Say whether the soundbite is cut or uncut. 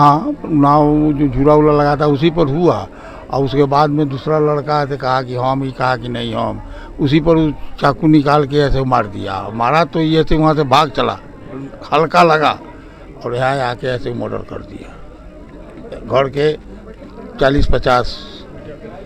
uncut